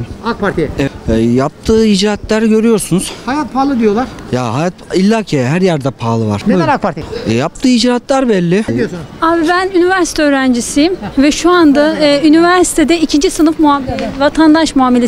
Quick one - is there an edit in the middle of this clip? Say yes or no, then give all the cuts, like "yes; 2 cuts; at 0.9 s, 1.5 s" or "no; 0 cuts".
yes; 4 cuts; at 0.9 s, 6.4 s, 7.1 s, 8.7 s